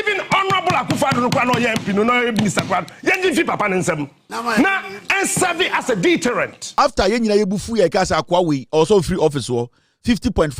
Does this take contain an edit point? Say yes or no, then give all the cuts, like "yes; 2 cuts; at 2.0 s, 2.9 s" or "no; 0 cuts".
yes; 1 cut; at 6.6 s